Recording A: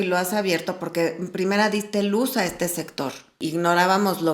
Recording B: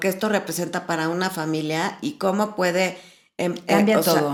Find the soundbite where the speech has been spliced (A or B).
A